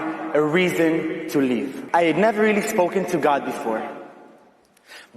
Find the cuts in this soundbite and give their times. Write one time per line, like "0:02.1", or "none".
0:01.8